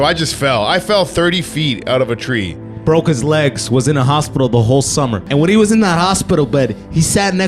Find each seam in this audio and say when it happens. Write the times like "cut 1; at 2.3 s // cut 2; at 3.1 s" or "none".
cut 1; at 5.2 s